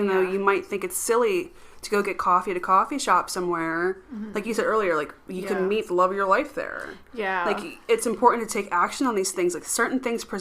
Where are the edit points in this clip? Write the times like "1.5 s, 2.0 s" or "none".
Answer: none